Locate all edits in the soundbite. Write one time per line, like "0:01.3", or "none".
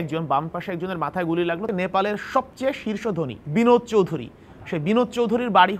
0:01.7
0:03.4